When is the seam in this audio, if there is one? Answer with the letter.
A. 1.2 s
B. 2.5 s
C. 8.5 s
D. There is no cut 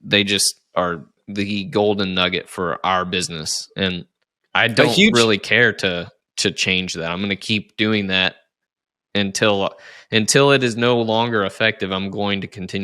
A